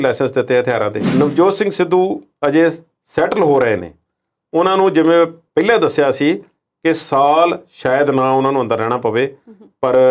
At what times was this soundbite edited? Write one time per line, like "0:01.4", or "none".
0:01.0